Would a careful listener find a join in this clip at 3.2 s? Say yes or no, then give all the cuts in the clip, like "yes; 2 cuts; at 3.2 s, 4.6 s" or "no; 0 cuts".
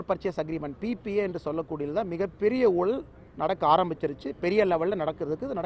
no; 0 cuts